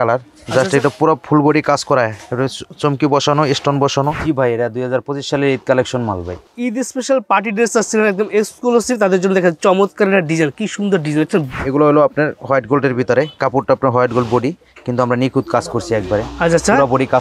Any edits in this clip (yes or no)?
yes